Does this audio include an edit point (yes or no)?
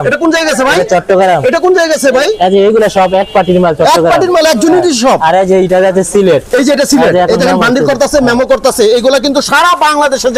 no